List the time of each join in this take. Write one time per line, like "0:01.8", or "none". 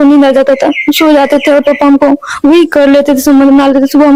none